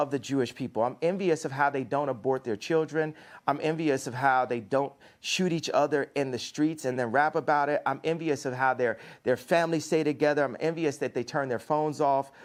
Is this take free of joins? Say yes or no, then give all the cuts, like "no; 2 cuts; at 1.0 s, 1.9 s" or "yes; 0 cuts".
yes; 0 cuts